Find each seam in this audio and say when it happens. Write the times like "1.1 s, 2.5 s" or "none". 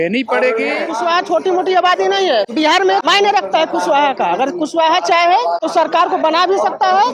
0.9 s, 2.8 s, 5.6 s